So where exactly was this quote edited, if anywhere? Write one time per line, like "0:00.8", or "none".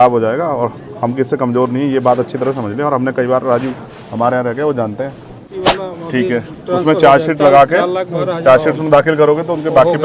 0:05.5